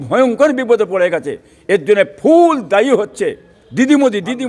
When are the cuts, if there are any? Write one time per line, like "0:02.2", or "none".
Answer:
none